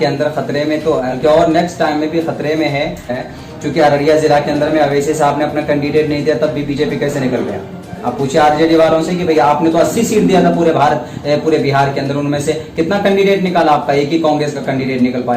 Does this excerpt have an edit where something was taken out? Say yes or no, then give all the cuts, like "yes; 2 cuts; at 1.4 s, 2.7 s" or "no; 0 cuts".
yes; 2 cuts; at 1.1 s, 3.3 s